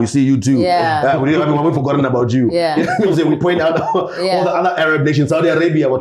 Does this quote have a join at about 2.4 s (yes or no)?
no